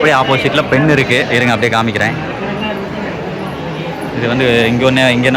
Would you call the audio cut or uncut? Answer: uncut